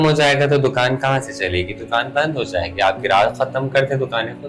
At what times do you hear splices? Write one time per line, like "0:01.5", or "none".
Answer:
none